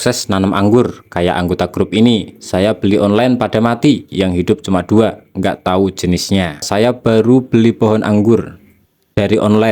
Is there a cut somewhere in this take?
yes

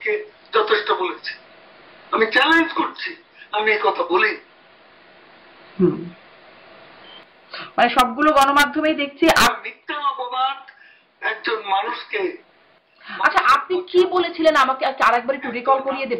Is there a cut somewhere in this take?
no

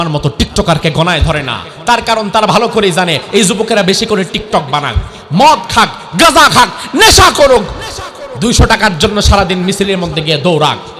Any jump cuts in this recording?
no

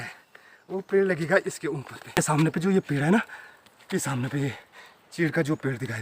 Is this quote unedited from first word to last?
no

